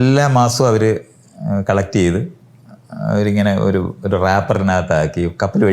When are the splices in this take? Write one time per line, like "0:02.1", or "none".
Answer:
none